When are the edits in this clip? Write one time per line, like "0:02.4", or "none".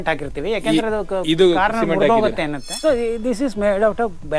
0:02.6